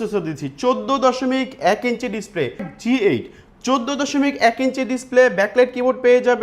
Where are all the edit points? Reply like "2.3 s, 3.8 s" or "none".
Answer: 2.6 s